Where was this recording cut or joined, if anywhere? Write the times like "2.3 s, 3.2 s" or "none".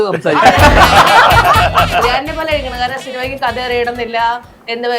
2.0 s